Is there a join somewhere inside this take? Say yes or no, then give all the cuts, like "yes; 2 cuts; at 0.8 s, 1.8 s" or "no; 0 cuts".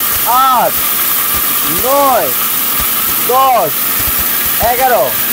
no; 0 cuts